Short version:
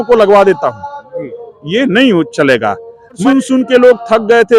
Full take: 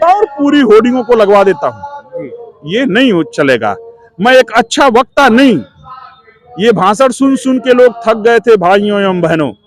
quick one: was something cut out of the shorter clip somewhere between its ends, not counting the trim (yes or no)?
yes